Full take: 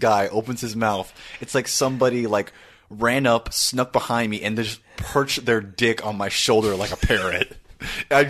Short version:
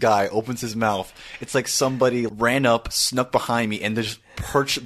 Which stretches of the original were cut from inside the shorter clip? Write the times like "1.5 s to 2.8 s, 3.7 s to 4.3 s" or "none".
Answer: 2.3 s to 2.9 s